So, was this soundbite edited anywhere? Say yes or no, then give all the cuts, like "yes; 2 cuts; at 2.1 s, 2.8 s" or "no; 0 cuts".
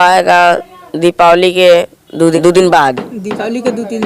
yes; 1 cut; at 2.4 s